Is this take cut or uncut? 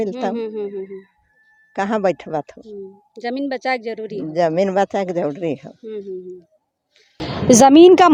uncut